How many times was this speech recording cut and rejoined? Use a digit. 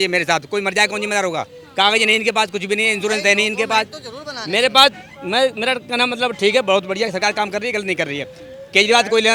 0